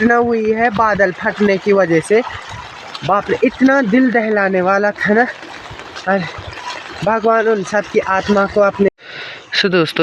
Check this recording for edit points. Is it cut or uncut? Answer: cut